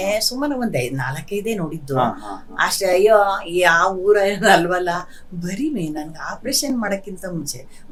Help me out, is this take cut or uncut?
uncut